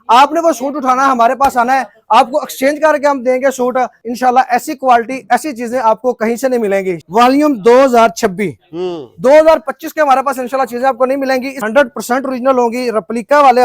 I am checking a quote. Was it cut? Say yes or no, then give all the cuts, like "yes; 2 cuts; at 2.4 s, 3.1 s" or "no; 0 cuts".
yes; 3 cuts; at 4.0 s, 7.0 s, 11.6 s